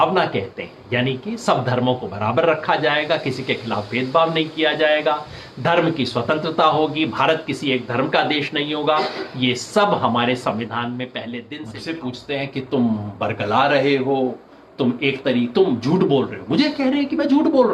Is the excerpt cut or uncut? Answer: cut